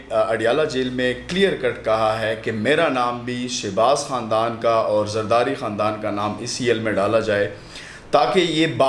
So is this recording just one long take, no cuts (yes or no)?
yes